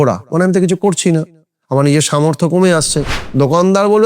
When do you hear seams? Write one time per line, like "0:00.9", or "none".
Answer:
0:03.0